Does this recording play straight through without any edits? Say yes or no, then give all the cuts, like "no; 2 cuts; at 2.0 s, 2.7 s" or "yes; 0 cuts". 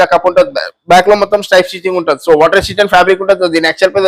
yes; 0 cuts